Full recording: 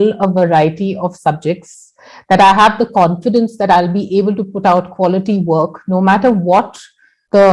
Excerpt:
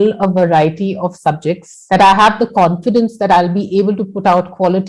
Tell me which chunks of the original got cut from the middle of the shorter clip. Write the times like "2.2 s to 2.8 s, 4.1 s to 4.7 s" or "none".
1.7 s to 2.1 s